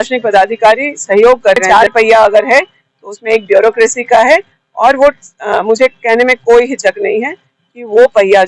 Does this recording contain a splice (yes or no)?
yes